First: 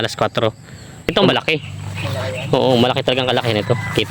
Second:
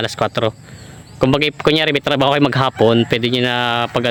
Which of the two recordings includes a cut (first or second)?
first